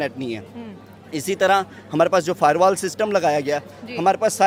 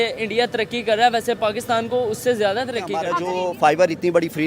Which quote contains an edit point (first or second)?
second